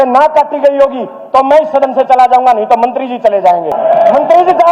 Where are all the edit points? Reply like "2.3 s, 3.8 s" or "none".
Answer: 3.7 s

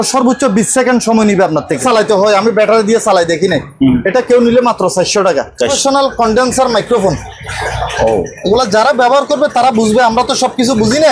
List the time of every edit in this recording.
1.8 s, 5.7 s

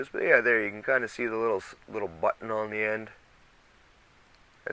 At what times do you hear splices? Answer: none

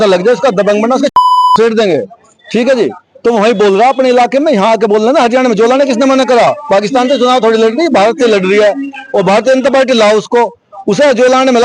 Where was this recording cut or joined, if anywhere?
none

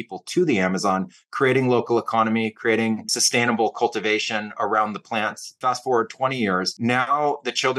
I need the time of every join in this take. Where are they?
3.1 s, 5.5 s, 6.7 s

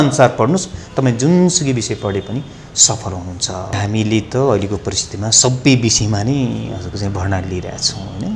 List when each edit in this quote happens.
3.8 s

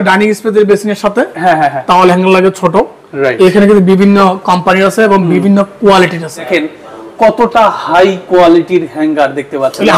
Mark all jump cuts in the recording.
6.4 s

